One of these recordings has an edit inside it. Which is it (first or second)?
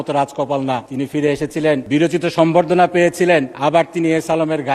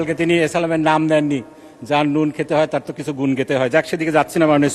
first